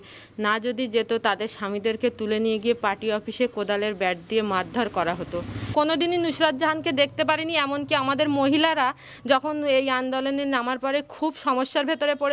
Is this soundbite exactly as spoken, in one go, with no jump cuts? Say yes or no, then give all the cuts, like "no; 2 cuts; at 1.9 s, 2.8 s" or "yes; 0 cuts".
no; 1 cut; at 5.6 s